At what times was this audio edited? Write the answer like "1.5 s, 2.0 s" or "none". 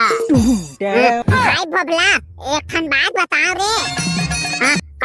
none